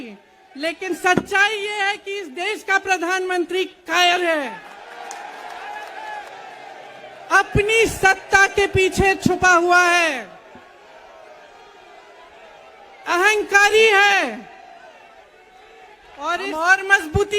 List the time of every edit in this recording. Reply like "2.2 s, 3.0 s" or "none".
6.3 s, 16.4 s